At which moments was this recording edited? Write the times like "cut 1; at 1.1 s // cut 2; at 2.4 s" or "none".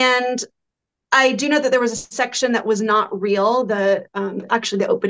none

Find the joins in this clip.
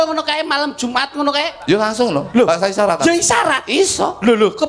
none

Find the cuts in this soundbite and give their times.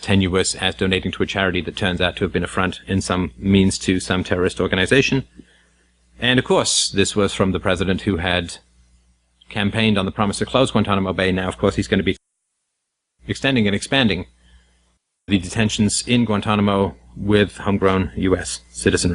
cut 1; at 9.2 s

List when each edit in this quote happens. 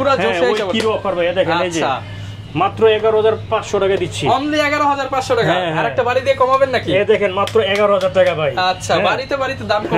none

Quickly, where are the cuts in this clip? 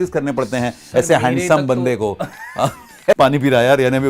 cut 1; at 3.1 s

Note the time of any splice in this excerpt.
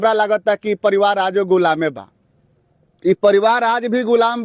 none

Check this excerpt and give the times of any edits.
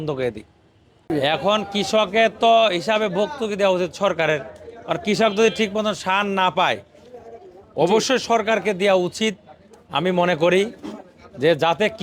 cut 1; at 1.1 s

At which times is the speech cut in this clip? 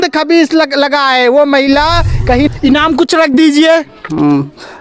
cut 1; at 2.5 s

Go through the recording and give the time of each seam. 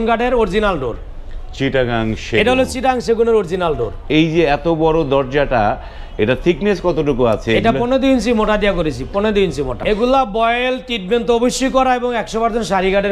cut 1; at 4.0 s // cut 2; at 9.8 s

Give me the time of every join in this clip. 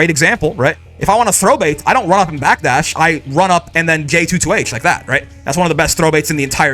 none

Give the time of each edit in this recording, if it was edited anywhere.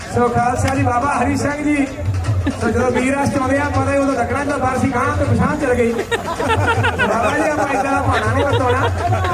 none

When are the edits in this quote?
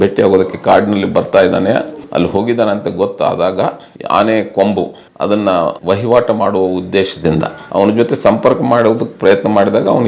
cut 1; at 2.0 s // cut 2; at 3.9 s // cut 3; at 5.8 s

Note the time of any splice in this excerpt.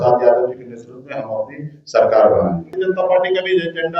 cut 1; at 2.7 s

